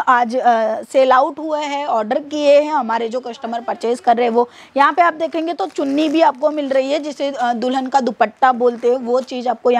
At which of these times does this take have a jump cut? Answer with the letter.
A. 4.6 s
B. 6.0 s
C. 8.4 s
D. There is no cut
D